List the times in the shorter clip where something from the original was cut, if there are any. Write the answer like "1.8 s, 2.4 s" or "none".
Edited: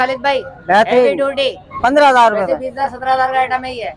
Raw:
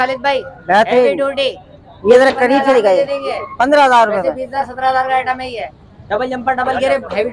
1.7 s